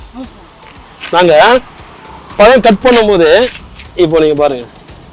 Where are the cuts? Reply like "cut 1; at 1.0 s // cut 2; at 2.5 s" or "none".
none